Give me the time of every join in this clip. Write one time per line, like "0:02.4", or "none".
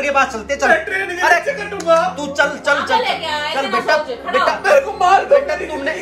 none

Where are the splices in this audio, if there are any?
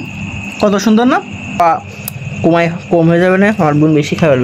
0:01.6

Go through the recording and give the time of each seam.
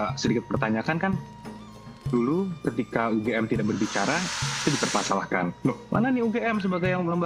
none

